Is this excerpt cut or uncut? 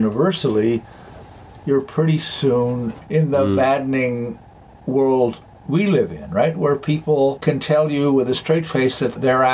cut